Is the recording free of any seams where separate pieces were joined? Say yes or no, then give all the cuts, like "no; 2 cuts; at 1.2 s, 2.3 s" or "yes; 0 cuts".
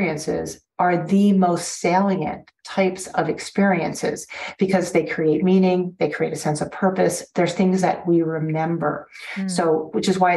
yes; 0 cuts